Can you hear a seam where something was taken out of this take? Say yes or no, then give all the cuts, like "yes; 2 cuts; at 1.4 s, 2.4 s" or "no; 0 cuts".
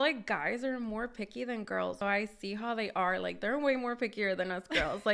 yes; 1 cut; at 2.0 s